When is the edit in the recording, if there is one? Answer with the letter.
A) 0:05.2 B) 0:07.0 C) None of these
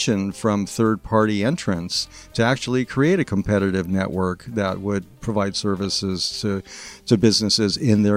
A